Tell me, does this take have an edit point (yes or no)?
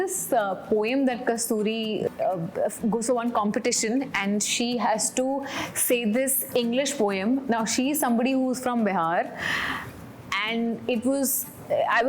yes